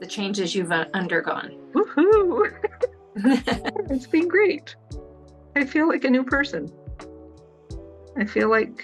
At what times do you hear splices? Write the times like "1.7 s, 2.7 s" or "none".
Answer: 1.5 s, 3.7 s